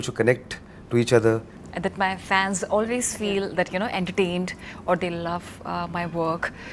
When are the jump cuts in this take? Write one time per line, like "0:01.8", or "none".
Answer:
0:01.5